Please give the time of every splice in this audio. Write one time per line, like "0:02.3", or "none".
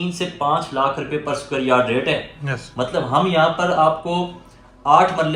none